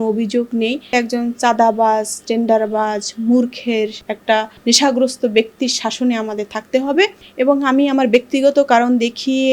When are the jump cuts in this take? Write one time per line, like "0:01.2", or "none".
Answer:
0:00.9
0:04.3
0:07.2